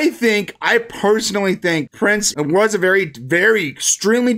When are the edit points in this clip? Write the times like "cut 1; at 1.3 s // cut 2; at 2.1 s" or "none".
cut 1; at 2.2 s